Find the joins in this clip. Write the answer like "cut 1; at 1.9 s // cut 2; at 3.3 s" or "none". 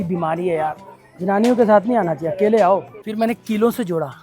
cut 1; at 3.0 s